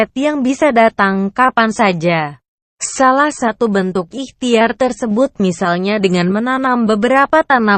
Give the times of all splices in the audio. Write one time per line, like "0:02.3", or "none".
0:05.2